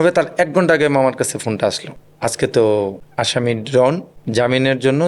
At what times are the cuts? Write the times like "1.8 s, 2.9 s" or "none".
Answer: 1.9 s